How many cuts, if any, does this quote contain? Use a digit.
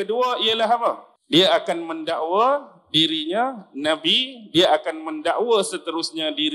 1